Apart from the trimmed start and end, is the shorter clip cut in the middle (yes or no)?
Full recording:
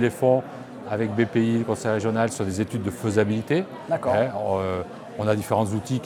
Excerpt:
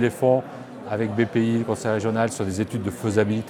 no